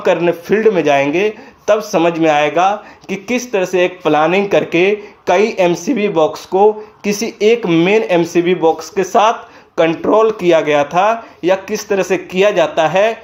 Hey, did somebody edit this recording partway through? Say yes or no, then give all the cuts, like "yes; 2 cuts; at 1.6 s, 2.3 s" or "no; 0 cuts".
no; 0 cuts